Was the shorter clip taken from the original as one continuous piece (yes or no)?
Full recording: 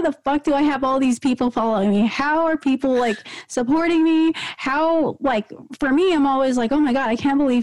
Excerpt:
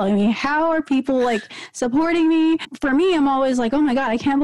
no